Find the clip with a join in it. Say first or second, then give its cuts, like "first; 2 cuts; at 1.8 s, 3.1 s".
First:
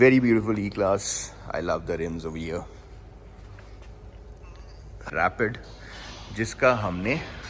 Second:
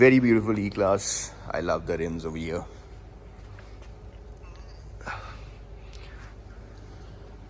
first; 1 cut; at 5.1 s